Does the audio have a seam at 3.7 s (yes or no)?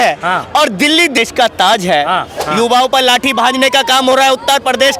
no